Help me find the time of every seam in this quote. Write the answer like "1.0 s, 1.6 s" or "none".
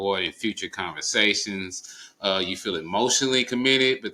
none